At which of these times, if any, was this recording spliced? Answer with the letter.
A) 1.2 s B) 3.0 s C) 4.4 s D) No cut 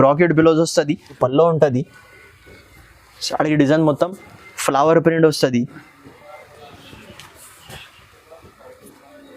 A